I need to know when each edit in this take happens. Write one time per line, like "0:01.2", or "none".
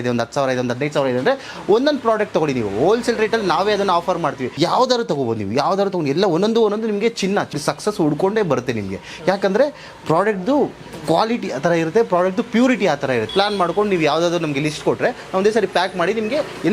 0:04.5
0:07.6
0:13.3